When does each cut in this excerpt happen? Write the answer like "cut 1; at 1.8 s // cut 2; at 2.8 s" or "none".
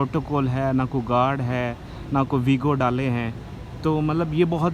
none